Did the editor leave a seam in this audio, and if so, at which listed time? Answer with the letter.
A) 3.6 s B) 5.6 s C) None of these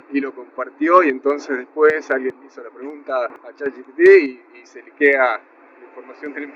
A